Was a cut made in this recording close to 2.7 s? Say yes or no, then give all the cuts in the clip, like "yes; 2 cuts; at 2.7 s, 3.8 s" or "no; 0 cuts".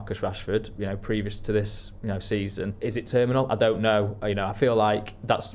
yes; 1 cut; at 2.7 s